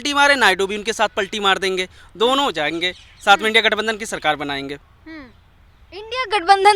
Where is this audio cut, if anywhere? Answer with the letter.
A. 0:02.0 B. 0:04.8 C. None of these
C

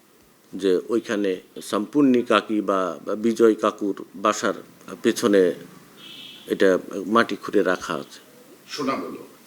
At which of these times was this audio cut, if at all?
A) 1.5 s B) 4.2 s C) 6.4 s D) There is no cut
A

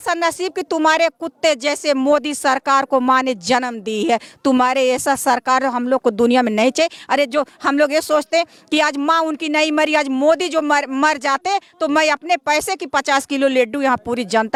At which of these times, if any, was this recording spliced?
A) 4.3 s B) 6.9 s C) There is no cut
C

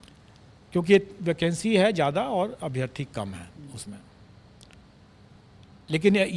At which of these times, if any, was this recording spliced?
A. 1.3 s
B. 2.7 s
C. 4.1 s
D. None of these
D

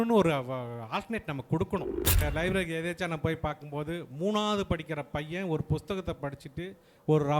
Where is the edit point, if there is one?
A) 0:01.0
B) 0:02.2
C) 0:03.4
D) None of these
B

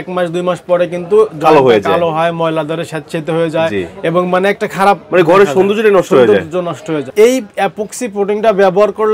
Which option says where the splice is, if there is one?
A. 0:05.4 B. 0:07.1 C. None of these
B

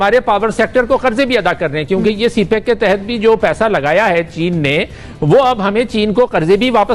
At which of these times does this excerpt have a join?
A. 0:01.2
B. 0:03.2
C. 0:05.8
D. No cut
D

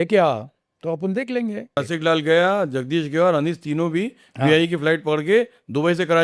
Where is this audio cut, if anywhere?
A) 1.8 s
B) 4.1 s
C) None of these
A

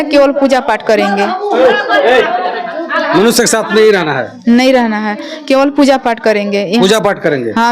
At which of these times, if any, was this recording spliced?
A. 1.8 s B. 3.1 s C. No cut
C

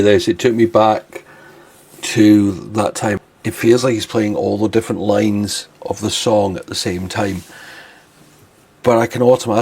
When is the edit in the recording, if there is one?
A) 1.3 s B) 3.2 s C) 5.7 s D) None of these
B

